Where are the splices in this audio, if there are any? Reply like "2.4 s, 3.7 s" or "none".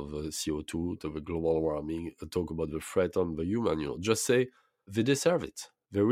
1.0 s, 4.8 s